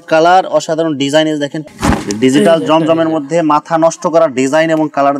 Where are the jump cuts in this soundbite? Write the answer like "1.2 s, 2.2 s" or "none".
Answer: 1.6 s